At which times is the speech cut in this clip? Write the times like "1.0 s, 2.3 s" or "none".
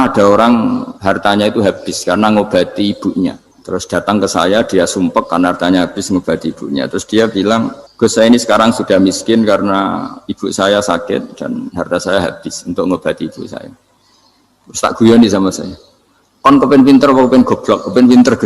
0.9 s, 3.5 s, 7.8 s